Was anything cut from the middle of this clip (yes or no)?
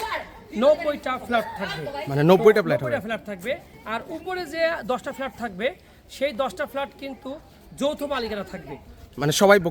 no